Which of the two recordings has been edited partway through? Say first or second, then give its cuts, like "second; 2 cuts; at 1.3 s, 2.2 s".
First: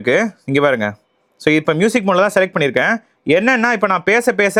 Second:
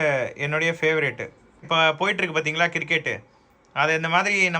second; 1 cut; at 1.6 s